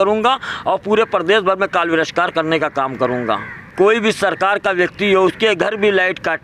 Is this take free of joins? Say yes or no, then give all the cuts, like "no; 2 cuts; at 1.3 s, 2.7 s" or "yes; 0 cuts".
no; 1 cut; at 3.7 s